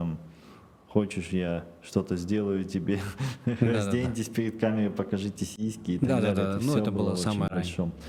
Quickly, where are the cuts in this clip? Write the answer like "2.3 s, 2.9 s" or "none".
none